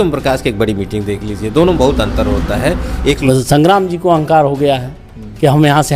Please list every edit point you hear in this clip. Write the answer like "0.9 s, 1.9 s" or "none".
3.2 s